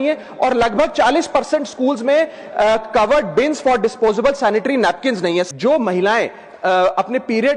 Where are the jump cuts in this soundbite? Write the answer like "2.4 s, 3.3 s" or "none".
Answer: 5.5 s